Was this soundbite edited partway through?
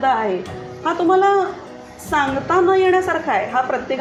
no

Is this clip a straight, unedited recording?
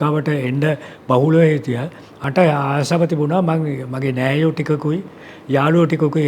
no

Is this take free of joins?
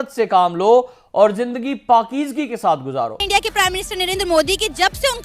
no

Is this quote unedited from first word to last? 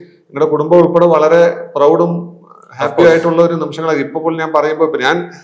yes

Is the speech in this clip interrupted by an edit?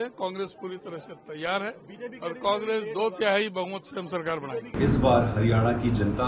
yes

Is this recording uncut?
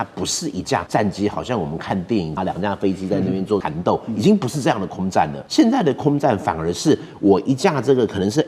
no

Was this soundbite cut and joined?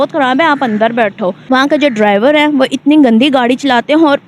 yes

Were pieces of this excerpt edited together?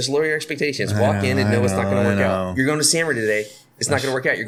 no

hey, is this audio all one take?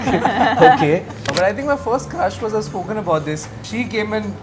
no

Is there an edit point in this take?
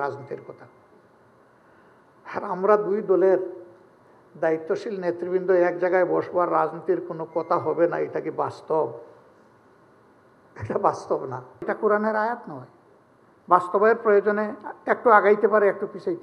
yes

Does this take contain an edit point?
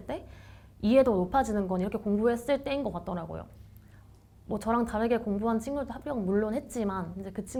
no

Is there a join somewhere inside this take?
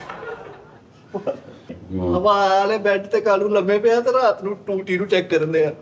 yes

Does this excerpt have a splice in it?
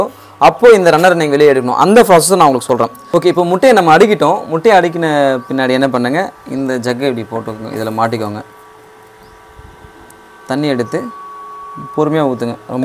yes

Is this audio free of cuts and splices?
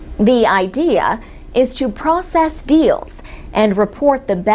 no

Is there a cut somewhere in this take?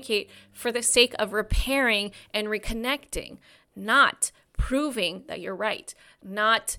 no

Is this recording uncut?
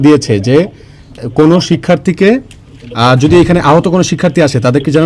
yes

